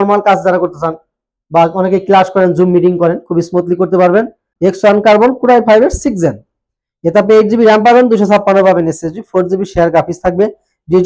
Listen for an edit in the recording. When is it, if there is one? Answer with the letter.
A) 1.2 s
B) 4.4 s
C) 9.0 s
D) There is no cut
B